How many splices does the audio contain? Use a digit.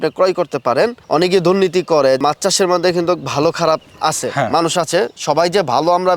2